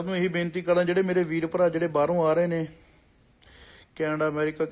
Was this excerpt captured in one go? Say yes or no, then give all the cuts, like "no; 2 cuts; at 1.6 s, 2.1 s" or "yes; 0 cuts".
yes; 0 cuts